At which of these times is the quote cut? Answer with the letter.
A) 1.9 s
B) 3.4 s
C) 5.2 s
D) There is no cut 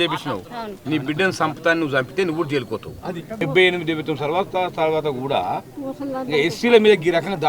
B